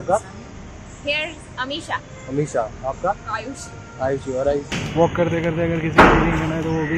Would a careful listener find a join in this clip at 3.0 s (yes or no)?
no